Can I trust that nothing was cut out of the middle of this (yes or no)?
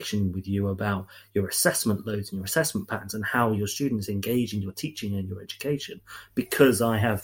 yes